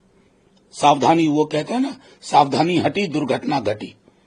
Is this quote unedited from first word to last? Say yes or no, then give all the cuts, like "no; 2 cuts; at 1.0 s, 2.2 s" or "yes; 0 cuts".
yes; 0 cuts